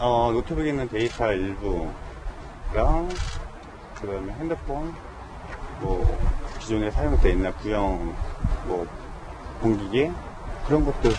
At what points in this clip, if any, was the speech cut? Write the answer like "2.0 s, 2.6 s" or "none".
7.4 s